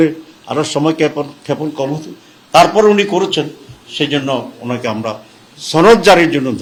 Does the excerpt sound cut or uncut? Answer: uncut